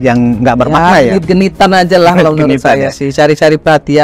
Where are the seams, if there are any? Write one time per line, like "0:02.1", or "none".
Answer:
none